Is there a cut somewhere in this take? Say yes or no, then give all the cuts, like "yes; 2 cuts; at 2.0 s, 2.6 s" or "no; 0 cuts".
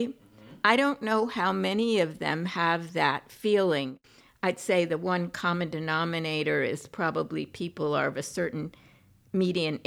yes; 1 cut; at 3.9 s